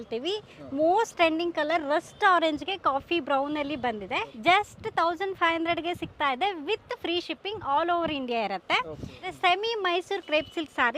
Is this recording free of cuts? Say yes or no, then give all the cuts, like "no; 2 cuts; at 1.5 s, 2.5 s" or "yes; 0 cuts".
no; 2 cuts; at 4.3 s, 9.3 s